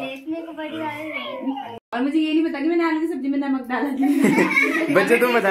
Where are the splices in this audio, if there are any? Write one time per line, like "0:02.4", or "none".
0:01.9

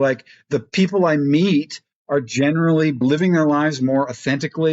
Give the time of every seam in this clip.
0:03.0

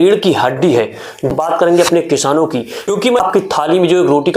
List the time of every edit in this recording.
0:01.3
0:03.2

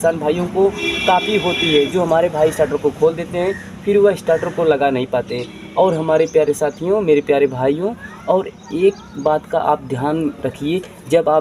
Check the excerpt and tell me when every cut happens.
none

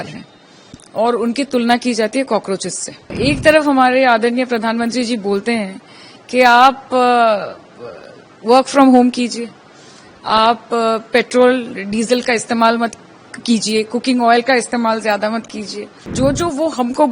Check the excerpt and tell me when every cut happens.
0:03.1
0:16.0

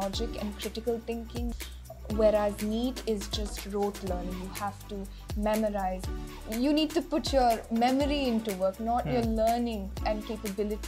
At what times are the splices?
0:01.5
0:06.1

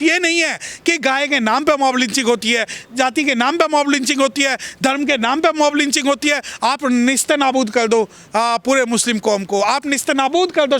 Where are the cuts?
0:06.5

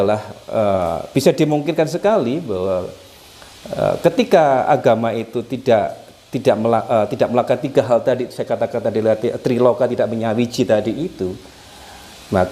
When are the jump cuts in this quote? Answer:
none

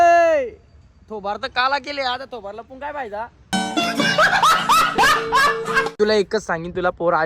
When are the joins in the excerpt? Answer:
0:03.5
0:06.0

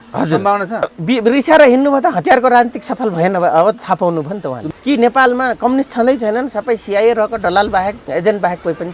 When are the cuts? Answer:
0:01.0
0:04.6

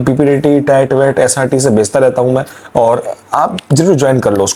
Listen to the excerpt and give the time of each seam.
none

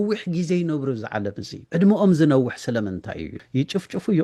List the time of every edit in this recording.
0:01.5
0:03.3

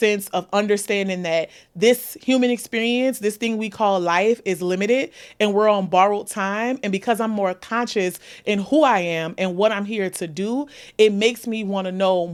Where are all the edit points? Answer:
none

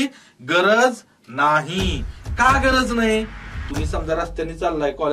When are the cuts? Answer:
0:03.6

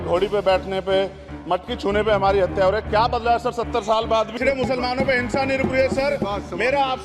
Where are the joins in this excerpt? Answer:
0:04.3

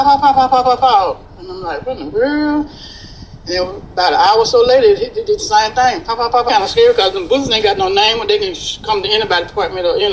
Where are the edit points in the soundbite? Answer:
0:06.4

